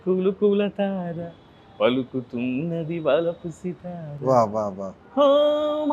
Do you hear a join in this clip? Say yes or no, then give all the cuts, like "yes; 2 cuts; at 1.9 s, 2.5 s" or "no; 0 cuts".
no; 0 cuts